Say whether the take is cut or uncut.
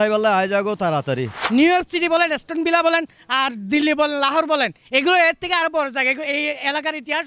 cut